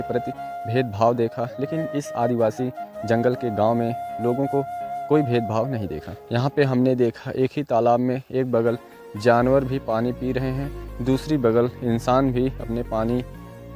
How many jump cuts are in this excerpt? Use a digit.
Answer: 0